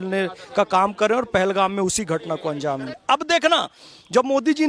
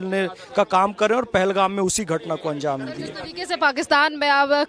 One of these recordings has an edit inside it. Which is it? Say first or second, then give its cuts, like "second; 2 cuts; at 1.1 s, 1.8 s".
first; 1 cut; at 3.0 s